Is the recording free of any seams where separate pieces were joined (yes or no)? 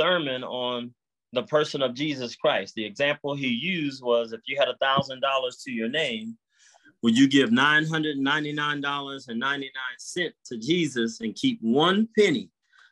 yes